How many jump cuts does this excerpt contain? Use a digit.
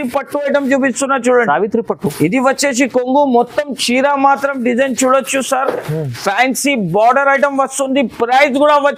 0